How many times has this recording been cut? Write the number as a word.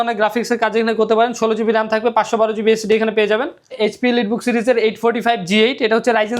one